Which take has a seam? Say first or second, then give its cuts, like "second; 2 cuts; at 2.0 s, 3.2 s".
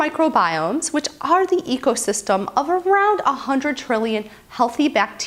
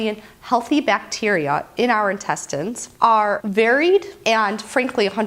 second; 1 cut; at 3.2 s